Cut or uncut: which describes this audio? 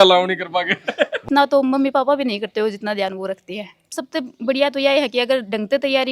cut